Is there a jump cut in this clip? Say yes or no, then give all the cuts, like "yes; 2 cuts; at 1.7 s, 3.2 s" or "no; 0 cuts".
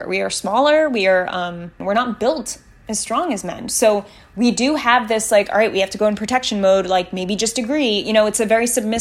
yes; 1 cut; at 1.7 s